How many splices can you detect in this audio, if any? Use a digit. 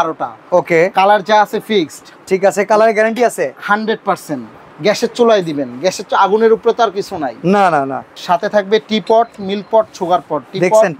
1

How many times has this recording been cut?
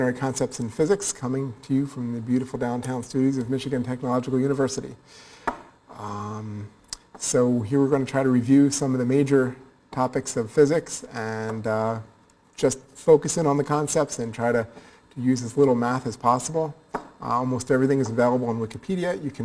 0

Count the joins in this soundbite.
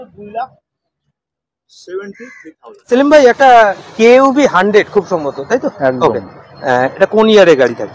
1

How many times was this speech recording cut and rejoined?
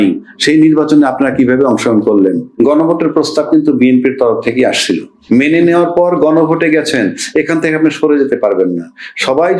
2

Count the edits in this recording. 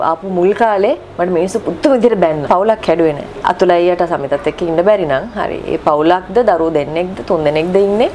2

